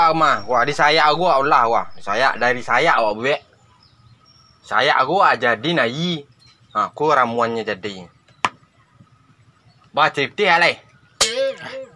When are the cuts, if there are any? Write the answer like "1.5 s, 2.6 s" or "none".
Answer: 11.1 s